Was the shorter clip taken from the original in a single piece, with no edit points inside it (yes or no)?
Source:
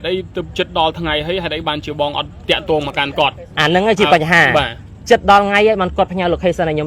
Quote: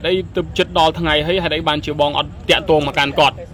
yes